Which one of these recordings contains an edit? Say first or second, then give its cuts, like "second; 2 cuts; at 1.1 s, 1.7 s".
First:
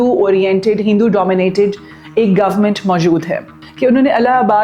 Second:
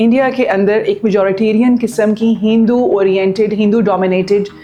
first; 1 cut; at 3.6 s